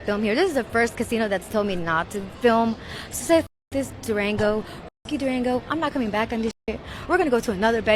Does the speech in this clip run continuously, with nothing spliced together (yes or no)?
yes